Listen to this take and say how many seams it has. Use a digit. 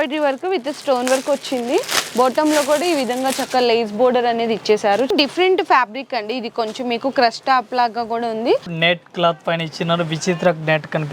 2